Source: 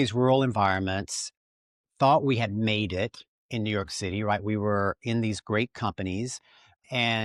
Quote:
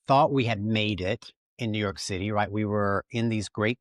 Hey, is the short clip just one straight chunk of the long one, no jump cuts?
yes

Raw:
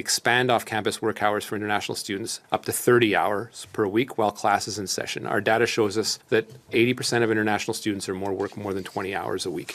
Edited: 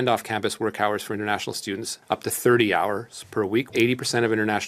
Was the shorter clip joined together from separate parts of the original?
yes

